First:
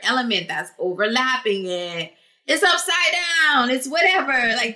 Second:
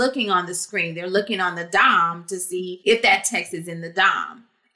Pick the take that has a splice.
second; 1 cut; at 2.7 s

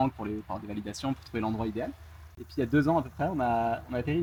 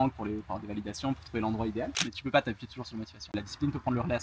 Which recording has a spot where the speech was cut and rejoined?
second; 2 cuts; at 2.0 s, 3.3 s

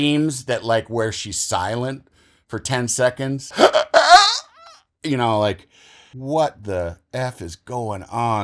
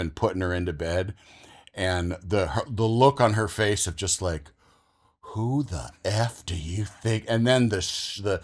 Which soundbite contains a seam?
first; 2 cuts; at 3.5 s, 6.1 s

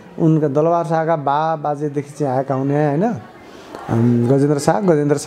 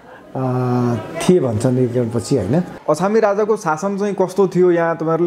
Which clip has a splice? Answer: second; 1 cut; at 2.7 s

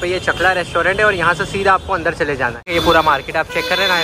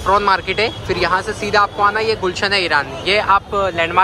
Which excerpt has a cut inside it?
first; 1 cut; at 2.6 s

